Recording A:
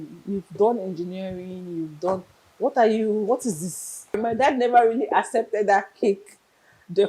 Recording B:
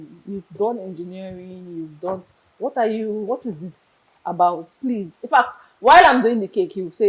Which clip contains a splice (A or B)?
A